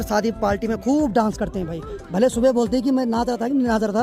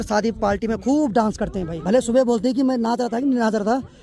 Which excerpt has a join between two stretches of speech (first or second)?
second